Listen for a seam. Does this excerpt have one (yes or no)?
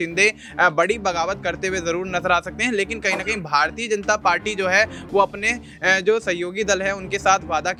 no